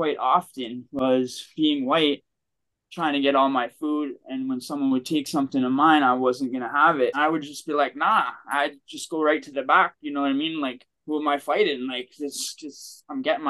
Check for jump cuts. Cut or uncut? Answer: cut